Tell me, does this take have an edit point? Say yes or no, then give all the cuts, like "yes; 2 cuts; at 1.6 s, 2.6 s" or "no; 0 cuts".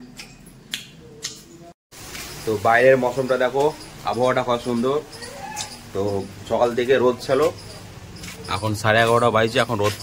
yes; 1 cut; at 2.1 s